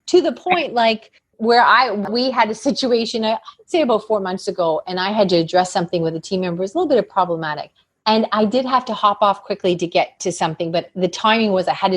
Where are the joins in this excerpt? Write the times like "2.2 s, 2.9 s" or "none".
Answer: 2.1 s